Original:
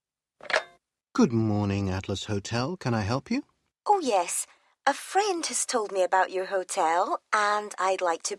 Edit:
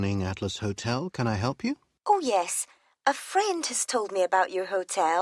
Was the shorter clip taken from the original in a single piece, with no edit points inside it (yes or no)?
no